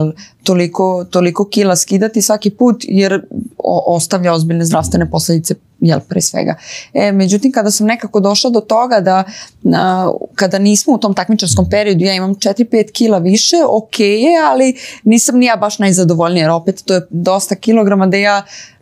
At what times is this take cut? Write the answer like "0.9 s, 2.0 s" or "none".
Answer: none